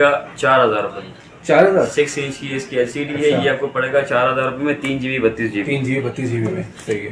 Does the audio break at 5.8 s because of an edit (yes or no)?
no